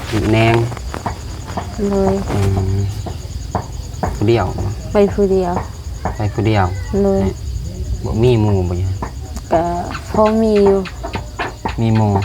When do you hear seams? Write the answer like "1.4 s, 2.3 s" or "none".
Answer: 4.2 s